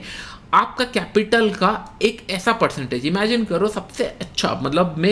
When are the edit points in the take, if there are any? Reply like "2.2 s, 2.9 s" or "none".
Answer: none